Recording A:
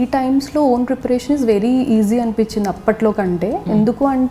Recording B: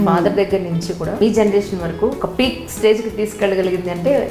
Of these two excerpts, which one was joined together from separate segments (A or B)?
B